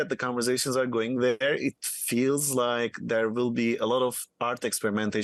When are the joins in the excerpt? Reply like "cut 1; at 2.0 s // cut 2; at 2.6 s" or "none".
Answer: none